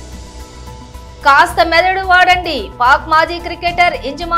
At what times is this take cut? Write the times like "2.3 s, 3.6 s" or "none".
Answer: 1.2 s